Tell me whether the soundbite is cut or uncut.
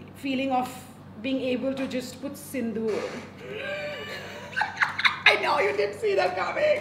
uncut